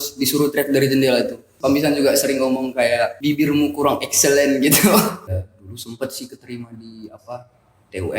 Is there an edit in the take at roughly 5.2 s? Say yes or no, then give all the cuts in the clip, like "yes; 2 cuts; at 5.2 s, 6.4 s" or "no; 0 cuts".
yes; 3 cuts; at 1.5 s, 3.2 s, 5.2 s